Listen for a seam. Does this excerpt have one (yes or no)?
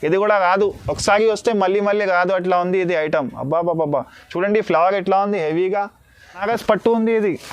yes